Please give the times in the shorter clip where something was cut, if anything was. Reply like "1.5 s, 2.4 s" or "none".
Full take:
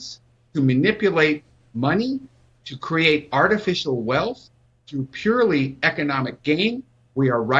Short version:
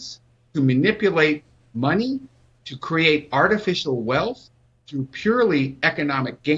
none